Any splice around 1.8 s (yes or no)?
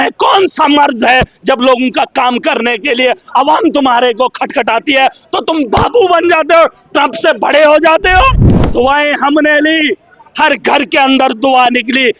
no